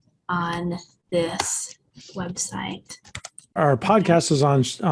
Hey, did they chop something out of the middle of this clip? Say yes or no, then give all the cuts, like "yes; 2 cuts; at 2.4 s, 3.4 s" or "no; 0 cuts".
yes; 1 cut; at 3.5 s